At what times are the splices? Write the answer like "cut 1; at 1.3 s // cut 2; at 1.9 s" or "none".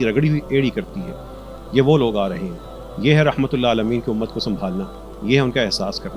none